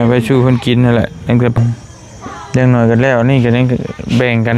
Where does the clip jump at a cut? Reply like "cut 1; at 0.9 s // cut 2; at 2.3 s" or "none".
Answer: cut 1; at 1.6 s